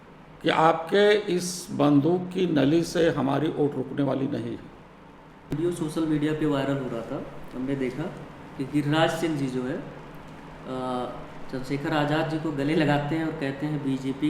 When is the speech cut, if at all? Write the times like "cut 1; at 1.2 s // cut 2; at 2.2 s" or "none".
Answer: cut 1; at 5.5 s